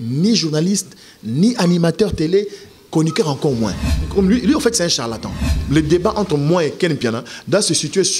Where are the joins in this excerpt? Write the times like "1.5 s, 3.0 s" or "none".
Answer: 4.0 s, 5.5 s